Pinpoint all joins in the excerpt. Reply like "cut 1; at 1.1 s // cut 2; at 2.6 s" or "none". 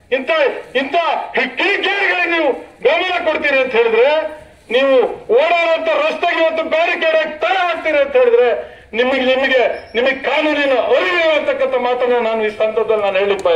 none